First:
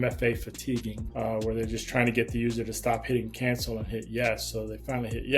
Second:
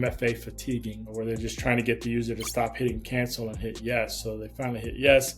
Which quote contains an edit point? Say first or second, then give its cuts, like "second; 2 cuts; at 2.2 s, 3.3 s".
second; 1 cut; at 1.1 s